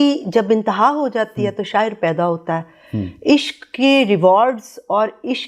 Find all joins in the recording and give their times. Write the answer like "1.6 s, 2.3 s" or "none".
none

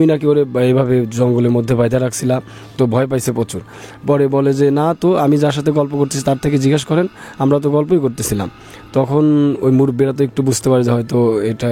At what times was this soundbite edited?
none

